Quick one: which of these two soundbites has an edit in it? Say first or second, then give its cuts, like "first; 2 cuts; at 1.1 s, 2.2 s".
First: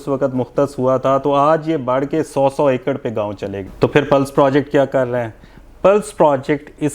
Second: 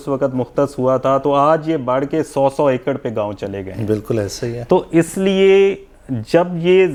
first; 1 cut; at 3.6 s